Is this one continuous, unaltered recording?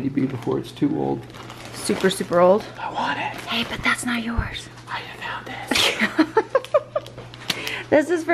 yes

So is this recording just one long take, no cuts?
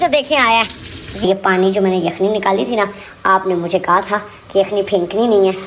no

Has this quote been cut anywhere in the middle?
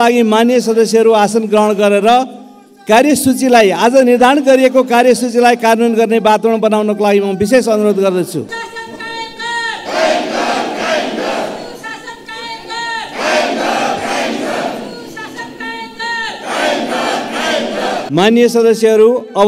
yes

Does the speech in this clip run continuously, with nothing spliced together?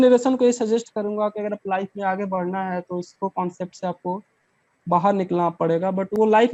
yes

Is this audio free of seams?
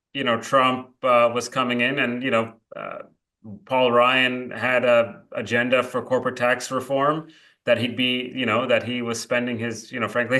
yes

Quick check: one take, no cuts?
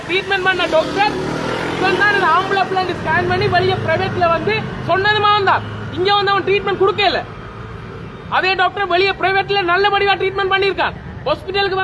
yes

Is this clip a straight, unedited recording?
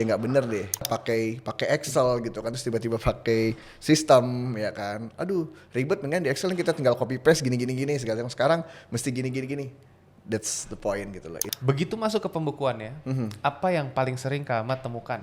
no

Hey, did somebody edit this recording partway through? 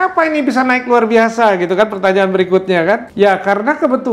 yes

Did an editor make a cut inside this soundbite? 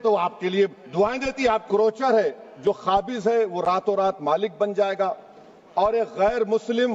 yes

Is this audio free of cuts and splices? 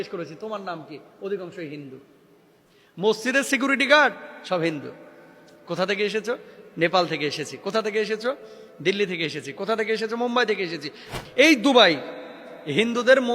no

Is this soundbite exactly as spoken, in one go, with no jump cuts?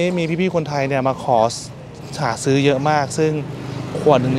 yes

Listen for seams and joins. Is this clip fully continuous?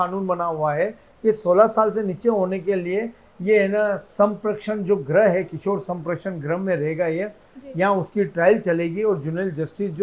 yes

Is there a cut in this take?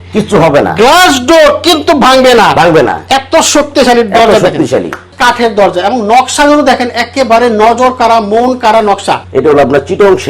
yes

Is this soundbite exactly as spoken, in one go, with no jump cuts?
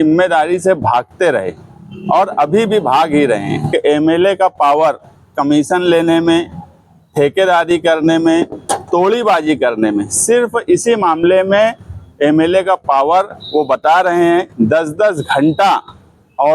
no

